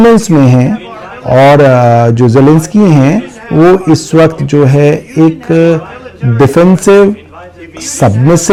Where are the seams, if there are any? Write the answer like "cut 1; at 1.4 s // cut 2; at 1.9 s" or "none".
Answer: none